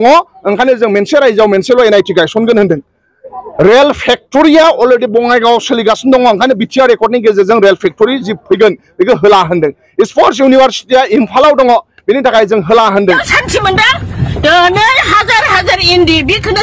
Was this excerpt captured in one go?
no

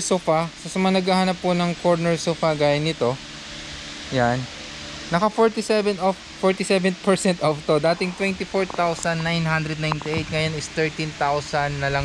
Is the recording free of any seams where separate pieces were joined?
yes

